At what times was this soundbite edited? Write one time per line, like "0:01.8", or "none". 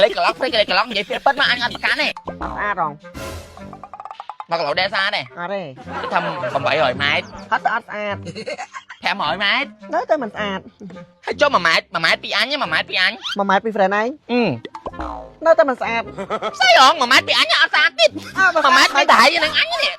0:02.2